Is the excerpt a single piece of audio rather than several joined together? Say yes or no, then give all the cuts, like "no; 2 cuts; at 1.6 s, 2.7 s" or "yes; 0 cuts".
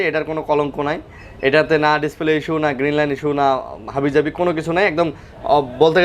yes; 0 cuts